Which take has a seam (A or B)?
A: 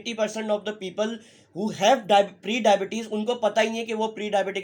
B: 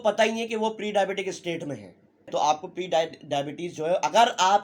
B